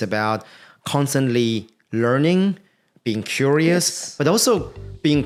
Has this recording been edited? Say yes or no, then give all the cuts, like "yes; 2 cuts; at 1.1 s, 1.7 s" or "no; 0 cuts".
no; 0 cuts